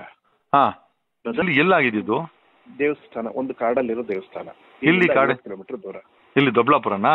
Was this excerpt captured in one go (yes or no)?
no